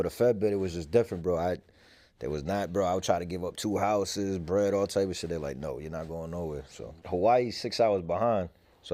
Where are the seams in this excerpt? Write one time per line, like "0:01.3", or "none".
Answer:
0:07.0